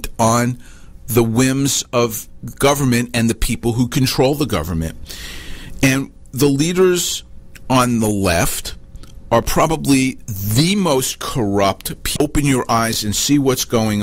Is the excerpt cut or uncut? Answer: cut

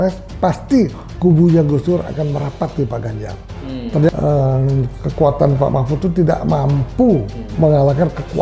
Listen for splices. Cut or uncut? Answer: cut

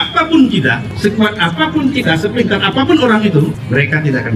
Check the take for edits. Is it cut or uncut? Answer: uncut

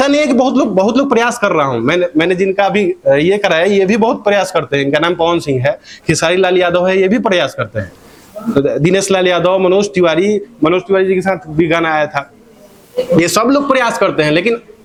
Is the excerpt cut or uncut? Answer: uncut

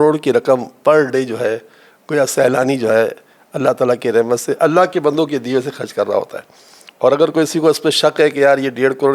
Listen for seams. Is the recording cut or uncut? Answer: uncut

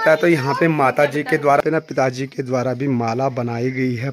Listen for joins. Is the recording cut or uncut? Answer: cut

